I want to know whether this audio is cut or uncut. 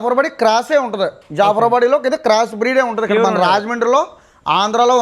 uncut